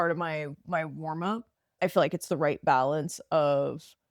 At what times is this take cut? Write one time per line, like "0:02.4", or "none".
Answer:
0:01.7